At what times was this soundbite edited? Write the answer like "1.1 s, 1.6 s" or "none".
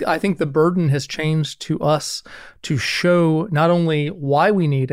none